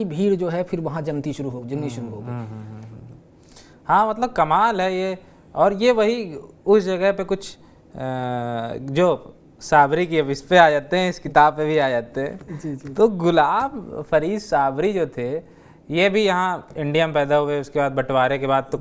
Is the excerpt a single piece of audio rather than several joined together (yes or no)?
yes